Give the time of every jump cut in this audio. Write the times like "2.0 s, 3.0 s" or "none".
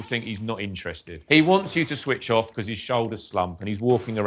1.2 s